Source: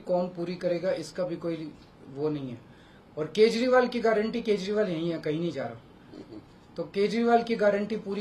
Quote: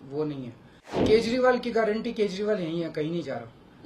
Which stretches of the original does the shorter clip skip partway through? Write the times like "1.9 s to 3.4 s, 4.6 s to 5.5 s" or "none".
3.1 s to 3.3 s